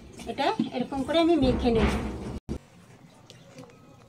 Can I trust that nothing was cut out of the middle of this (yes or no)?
no